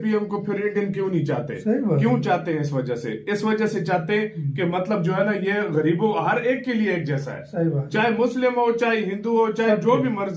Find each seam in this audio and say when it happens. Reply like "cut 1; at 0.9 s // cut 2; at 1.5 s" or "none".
none